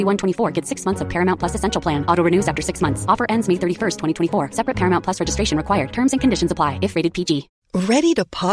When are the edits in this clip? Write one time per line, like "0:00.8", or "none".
0:07.6